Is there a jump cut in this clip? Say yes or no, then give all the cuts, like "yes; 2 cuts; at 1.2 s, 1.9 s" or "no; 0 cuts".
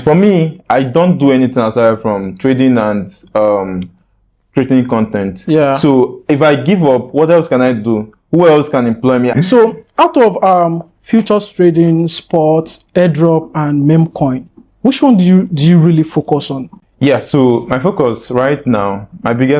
yes; 2 cuts; at 9.3 s, 12.8 s